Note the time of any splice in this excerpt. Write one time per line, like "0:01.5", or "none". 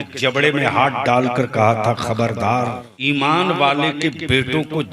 0:02.9